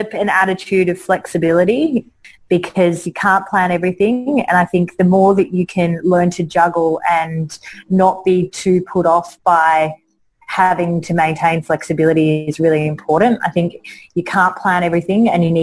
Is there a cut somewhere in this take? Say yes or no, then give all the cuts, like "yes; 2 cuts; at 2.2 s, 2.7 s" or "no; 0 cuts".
yes; 1 cut; at 2.2 s